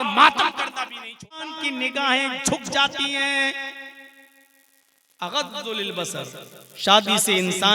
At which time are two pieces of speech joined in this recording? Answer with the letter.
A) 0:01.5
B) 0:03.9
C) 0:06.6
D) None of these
A